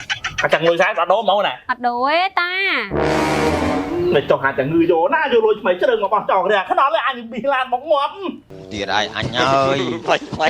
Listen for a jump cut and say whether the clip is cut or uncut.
cut